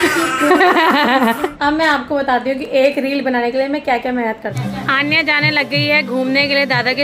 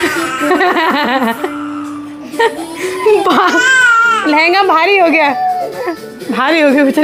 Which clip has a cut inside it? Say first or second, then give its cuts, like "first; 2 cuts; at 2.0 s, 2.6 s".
first; 2 cuts; at 1.5 s, 4.5 s